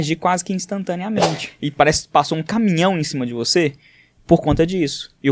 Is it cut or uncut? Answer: cut